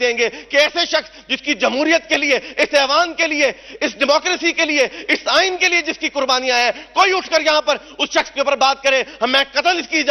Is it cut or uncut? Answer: uncut